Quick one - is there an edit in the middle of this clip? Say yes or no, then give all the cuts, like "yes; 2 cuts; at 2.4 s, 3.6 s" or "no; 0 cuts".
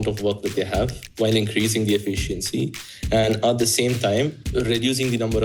no; 0 cuts